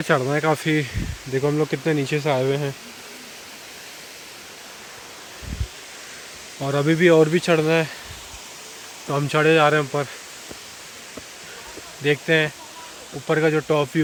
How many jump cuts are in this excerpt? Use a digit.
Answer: 0